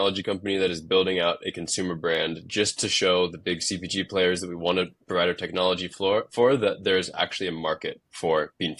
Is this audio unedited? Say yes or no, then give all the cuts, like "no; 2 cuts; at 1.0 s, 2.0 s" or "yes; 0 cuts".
yes; 0 cuts